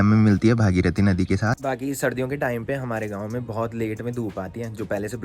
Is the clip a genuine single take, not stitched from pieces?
yes; 0 cuts

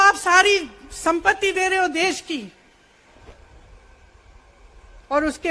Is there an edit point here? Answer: yes; 1 cut; at 3.1 s

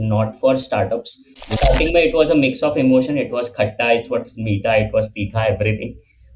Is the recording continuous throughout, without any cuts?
no; 1 cut; at 1.5 s

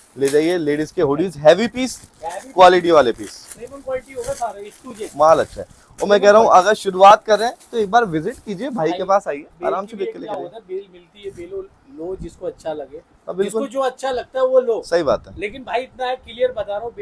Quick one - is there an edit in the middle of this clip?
no; 0 cuts

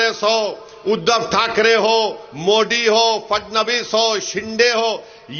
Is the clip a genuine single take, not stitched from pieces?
yes; 0 cuts

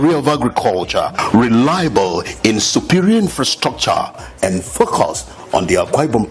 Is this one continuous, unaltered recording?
yes; 0 cuts

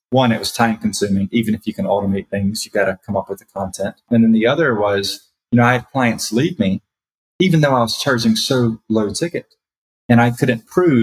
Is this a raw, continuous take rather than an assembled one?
no; 1 cut; at 4.1 s

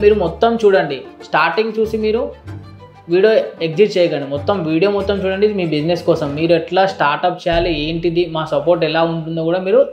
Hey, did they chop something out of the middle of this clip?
no; 0 cuts

